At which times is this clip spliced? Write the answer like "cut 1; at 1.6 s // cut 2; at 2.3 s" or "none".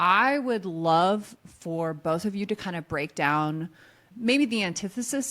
cut 1; at 4.1 s